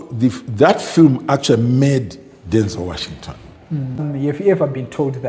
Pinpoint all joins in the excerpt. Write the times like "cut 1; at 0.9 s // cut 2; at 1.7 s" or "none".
cut 1; at 4.1 s

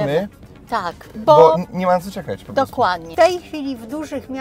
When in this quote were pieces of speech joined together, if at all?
cut 1; at 3.1 s

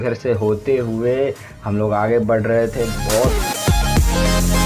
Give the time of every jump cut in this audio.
none

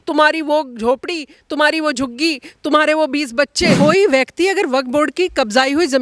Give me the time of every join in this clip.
cut 1; at 3.8 s

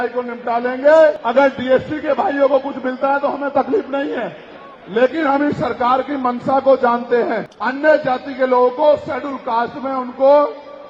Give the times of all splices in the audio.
cut 1; at 1.2 s // cut 2; at 7.5 s

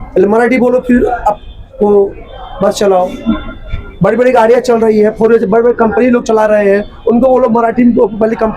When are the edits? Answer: none

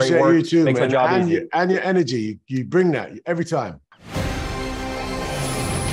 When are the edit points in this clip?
cut 1; at 3.8 s

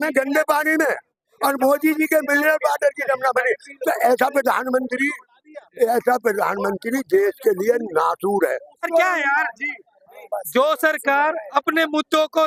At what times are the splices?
none

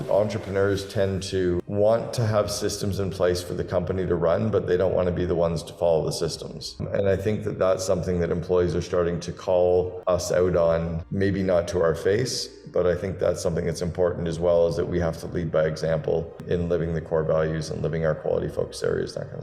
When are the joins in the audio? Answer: cut 1; at 6.8 s // cut 2; at 10.0 s

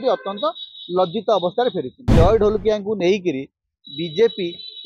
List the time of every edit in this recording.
cut 1; at 2.1 s

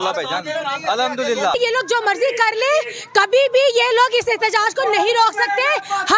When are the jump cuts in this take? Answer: cut 1; at 1.5 s

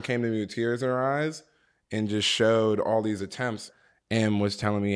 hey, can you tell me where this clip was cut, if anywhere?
cut 1; at 3.7 s

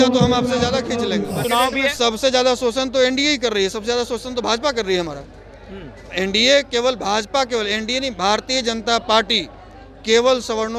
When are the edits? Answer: cut 1; at 1.4 s

